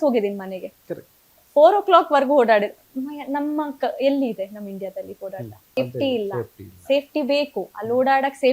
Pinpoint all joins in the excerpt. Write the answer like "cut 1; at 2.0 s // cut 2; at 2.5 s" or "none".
cut 1; at 5.8 s